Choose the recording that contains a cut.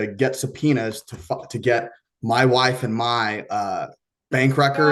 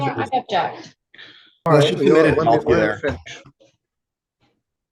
second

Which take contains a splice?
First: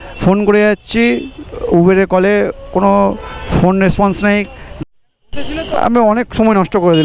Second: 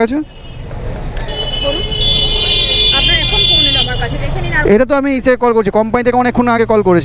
first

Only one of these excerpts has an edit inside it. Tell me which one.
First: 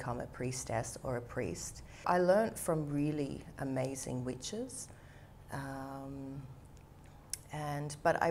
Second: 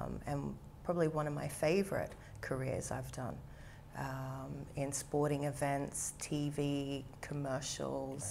first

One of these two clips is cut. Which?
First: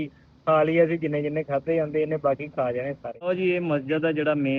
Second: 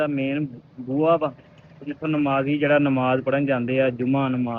first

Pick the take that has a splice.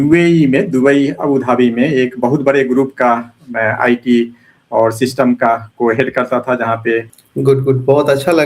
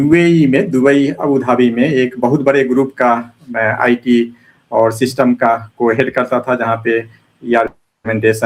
first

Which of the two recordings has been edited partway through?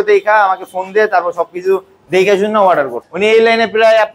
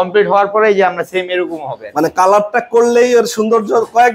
first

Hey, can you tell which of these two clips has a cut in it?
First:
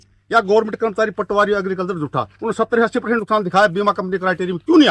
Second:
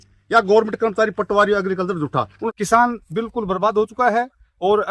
second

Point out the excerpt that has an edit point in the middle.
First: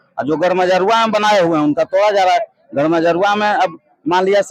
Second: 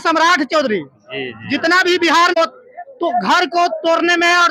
second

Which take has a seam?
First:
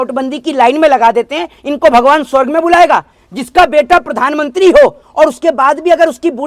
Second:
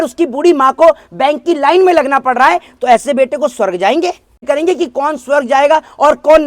second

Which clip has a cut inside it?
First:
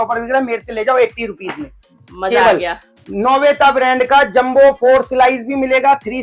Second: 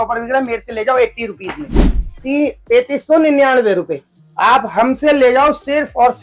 second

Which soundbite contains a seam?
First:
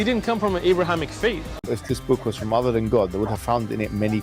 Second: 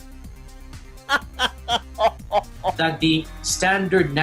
first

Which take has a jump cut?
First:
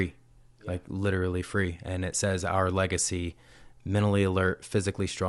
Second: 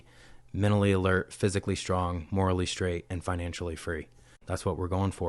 second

